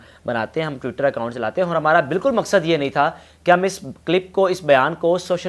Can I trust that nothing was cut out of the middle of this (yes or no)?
yes